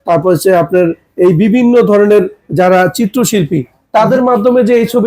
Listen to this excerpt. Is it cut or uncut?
uncut